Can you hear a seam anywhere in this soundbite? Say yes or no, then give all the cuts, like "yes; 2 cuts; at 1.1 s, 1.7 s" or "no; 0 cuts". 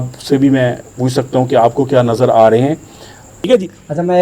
yes; 1 cut; at 3.3 s